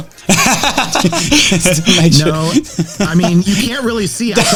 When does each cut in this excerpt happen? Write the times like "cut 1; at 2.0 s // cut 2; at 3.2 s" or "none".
none